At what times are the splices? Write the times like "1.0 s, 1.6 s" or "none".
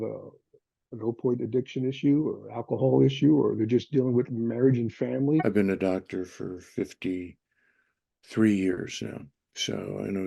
5.4 s